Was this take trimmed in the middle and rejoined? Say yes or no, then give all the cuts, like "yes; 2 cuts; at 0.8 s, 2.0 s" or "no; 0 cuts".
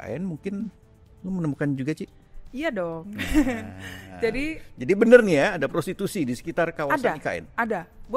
no; 0 cuts